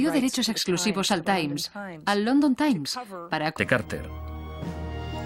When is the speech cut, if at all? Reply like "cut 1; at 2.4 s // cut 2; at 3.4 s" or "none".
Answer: none